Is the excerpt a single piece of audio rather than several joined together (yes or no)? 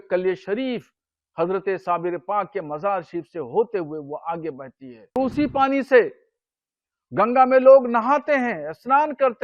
no